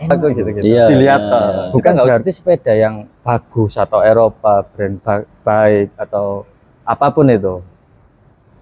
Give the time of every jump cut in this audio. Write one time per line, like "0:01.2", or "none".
0:02.1